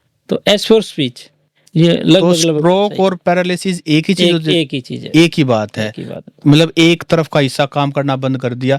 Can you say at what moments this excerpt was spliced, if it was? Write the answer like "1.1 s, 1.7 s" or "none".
1.6 s